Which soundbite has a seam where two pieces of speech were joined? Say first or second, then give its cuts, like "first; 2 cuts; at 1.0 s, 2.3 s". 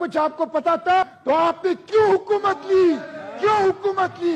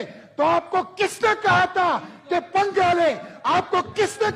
first; 1 cut; at 1.1 s